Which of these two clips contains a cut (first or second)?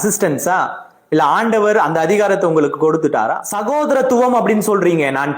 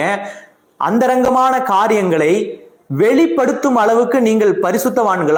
first